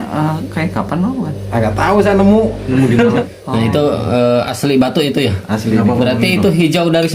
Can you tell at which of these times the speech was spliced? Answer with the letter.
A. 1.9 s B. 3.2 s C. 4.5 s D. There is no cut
B